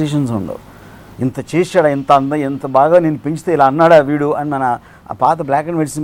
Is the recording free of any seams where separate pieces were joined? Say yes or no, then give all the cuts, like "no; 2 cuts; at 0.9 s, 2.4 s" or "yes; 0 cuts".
yes; 0 cuts